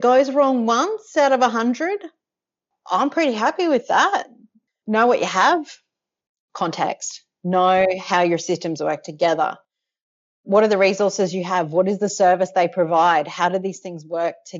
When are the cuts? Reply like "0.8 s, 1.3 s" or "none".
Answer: 4.2 s, 6.3 s